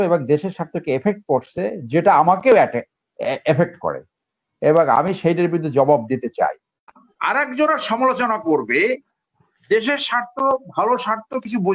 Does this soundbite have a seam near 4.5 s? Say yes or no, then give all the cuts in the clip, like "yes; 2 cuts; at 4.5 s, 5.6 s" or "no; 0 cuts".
no; 1 cut; at 7.1 s